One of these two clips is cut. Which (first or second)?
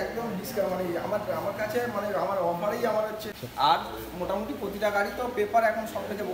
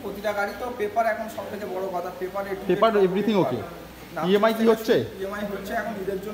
first